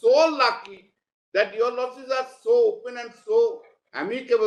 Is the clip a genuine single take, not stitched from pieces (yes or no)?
yes